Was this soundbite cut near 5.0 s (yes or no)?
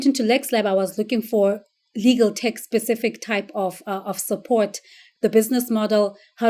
yes